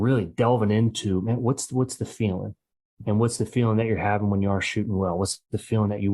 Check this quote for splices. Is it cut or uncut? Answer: uncut